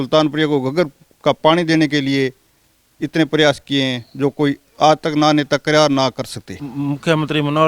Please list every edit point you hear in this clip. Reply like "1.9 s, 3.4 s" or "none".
6.7 s